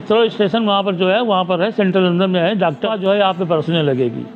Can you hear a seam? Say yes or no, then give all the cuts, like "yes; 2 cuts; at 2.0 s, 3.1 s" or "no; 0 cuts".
yes; 1 cut; at 2.9 s